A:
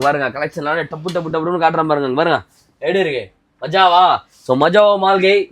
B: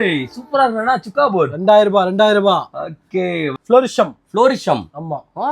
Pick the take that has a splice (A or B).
B